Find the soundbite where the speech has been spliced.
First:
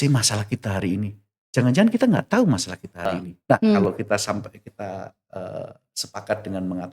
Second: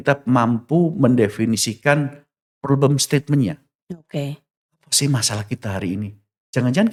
first; 1 cut; at 3.8 s

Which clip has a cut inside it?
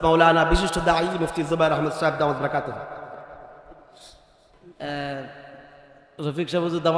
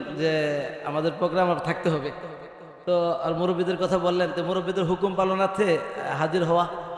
first; 1 cut; at 4.6 s

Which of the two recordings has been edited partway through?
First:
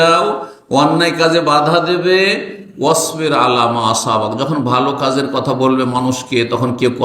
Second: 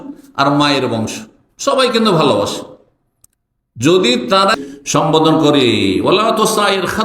second; 1 cut; at 4.6 s

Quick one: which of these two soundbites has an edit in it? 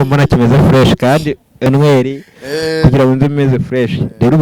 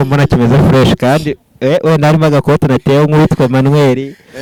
first; 1 cut; at 1.7 s

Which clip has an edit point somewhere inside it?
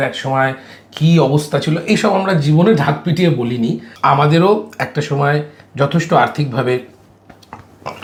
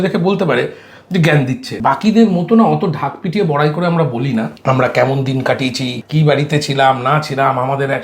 second; 2 cuts; at 1.7 s, 6.0 s

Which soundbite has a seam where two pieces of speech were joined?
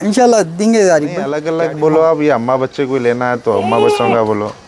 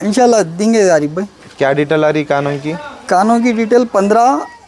first; 1 cut; at 1.4 s

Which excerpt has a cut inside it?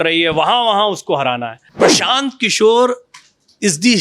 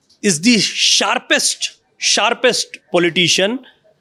first; 1 cut; at 1.6 s

